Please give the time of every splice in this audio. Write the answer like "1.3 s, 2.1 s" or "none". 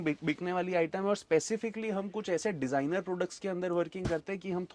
none